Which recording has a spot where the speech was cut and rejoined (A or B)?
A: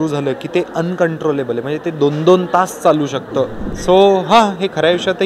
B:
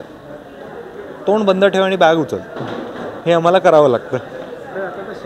A